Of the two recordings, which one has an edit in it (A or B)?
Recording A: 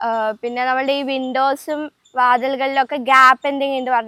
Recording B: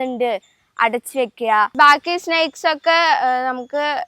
B